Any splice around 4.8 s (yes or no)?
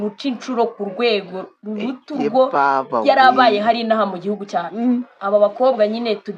yes